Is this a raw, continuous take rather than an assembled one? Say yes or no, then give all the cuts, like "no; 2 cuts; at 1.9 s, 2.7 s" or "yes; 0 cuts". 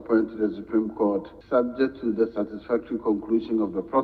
no; 1 cut; at 1.3 s